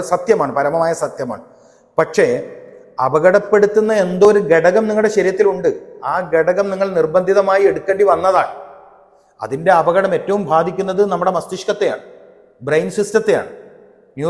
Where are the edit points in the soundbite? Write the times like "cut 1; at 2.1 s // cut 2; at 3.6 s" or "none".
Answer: none